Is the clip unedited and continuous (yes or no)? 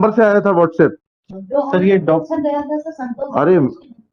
yes